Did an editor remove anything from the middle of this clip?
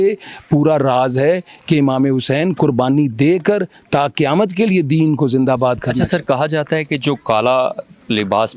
no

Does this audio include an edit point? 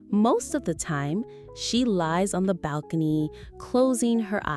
no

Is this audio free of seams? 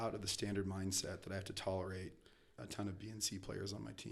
yes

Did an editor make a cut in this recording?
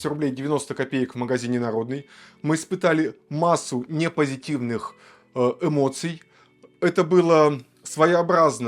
no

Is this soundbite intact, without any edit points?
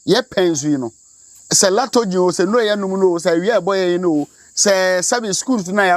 yes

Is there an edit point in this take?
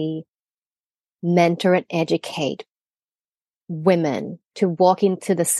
yes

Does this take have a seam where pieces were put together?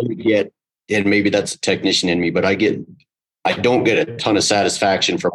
no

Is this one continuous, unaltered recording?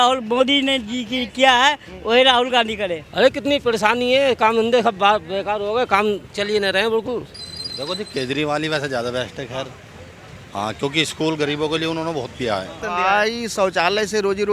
no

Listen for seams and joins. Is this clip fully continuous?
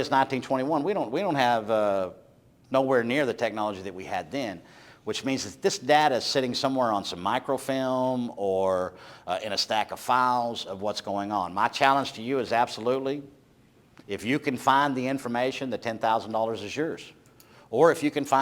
yes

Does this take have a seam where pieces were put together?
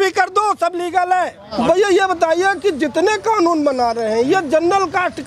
yes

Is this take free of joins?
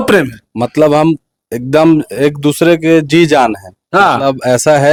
yes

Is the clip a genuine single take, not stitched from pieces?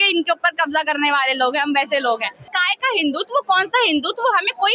no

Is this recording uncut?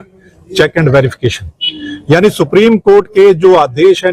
yes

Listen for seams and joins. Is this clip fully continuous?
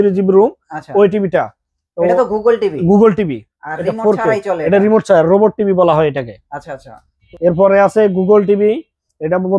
no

